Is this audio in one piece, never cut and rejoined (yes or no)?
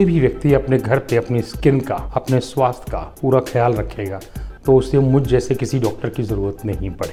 yes